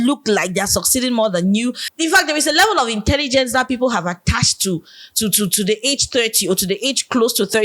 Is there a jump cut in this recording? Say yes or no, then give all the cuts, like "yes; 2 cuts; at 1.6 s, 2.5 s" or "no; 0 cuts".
yes; 1 cut; at 1.8 s